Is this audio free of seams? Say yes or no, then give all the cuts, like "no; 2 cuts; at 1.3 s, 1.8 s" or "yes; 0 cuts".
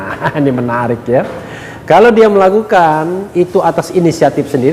yes; 0 cuts